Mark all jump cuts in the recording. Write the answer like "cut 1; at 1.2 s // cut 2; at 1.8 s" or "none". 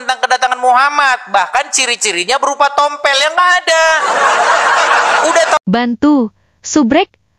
cut 1; at 5.6 s